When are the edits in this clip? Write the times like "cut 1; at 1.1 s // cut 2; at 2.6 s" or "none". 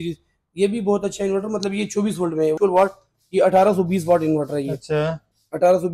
cut 1; at 2.6 s